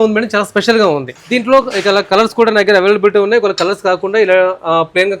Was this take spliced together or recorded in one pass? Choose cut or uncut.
cut